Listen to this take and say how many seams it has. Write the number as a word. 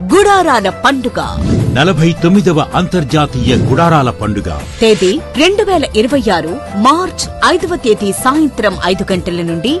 zero